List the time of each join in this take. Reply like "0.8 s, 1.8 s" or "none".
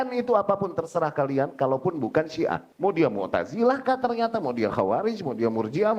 2.7 s